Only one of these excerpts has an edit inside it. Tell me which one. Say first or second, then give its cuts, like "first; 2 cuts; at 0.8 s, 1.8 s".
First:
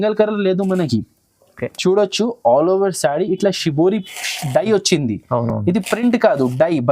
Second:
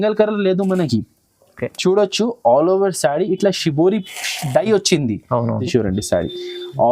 second; 1 cut; at 5.6 s